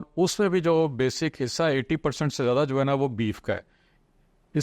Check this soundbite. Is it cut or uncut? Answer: uncut